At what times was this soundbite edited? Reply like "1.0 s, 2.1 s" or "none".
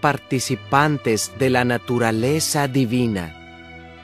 2.9 s